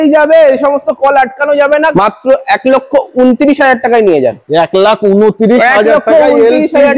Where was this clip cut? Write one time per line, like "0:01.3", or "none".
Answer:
0:01.9